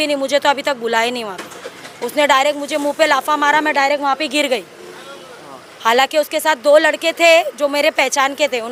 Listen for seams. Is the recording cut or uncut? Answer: uncut